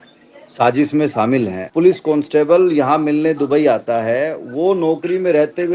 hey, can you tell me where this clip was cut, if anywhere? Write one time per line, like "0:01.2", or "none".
0:01.6

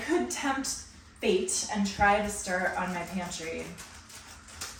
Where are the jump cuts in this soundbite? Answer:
none

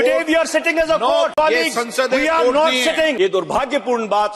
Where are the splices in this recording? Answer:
0:01.3
0:03.2

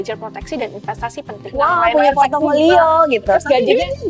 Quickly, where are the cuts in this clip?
0:01.5

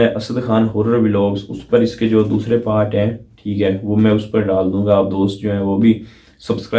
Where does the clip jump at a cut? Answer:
none

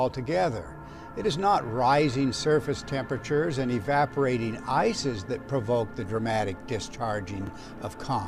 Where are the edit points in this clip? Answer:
none

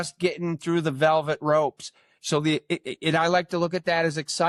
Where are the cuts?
none

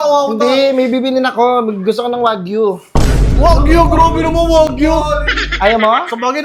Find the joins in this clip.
none

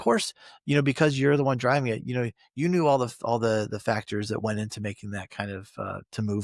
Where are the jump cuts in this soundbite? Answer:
none

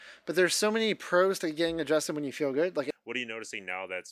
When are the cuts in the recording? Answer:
0:02.9

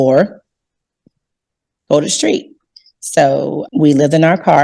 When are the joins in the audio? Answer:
0:03.6

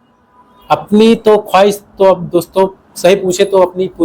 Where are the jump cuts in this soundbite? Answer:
none

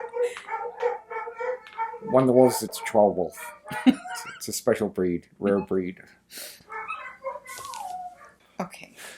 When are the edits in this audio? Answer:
0:02.7
0:08.2

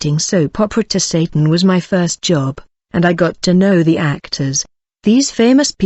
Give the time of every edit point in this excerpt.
none

